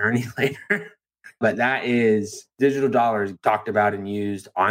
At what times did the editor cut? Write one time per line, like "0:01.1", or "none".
0:01.4
0:02.4
0:03.3